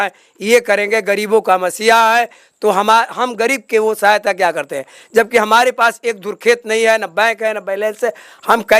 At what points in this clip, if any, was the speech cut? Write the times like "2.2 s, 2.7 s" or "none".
none